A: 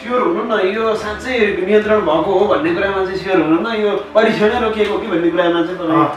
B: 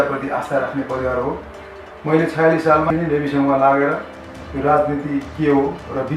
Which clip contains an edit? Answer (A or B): B